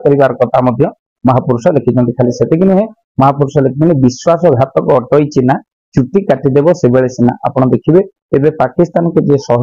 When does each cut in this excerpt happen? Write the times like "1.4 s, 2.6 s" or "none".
none